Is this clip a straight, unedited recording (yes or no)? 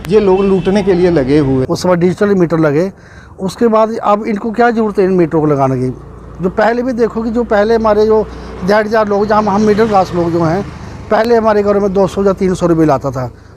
no